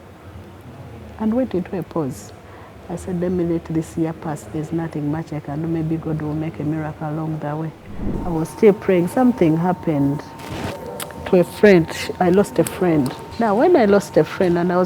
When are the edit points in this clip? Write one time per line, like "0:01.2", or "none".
0:08.1
0:13.2